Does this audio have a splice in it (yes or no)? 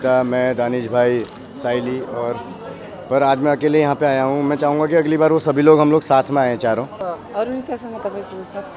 yes